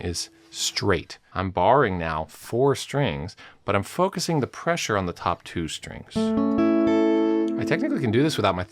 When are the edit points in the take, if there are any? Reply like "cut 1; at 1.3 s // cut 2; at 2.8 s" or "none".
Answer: cut 1; at 1.2 s // cut 2; at 7.5 s